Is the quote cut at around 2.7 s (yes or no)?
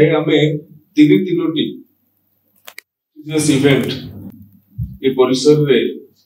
no